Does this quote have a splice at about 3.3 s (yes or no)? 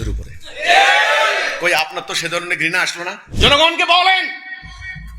yes